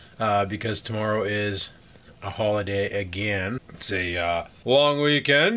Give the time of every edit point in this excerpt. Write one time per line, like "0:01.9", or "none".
0:04.0

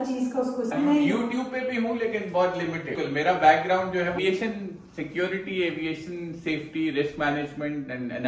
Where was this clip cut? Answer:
0:00.7
0:03.0
0:04.2

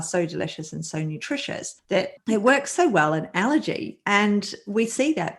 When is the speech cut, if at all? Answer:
0:02.0

